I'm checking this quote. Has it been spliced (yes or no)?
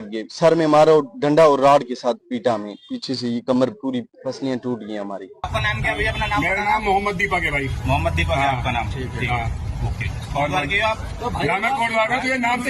yes